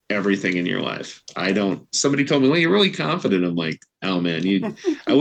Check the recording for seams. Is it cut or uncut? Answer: uncut